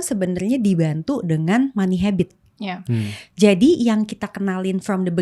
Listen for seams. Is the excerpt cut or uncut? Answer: uncut